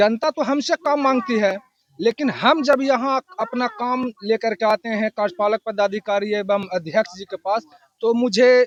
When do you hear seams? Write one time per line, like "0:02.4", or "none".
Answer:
none